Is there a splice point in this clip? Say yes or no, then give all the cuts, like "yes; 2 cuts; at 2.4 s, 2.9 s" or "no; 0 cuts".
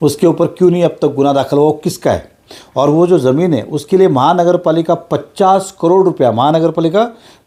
no; 0 cuts